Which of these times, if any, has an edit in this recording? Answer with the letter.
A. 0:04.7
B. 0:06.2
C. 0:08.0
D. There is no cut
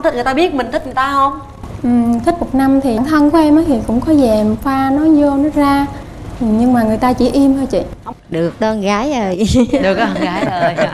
C